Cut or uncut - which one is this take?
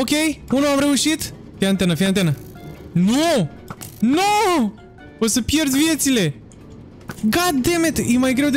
uncut